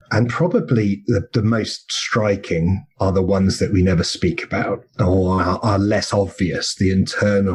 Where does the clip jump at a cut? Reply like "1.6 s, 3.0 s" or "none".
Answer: none